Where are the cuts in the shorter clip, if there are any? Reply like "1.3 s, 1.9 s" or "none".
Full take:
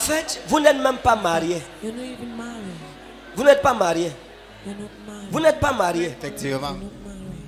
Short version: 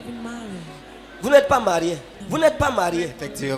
2.1 s